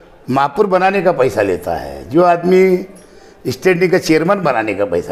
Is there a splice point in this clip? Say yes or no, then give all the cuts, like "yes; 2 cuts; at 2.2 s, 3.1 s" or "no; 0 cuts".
no; 0 cuts